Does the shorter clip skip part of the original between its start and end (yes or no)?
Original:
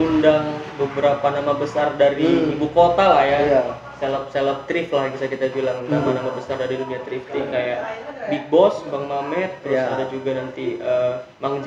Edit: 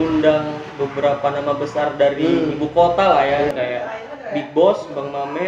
yes